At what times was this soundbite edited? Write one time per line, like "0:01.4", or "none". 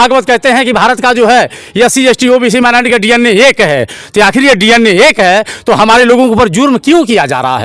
none